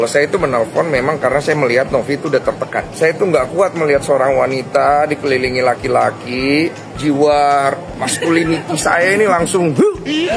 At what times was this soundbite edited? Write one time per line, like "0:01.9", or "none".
0:02.9
0:06.9
0:07.9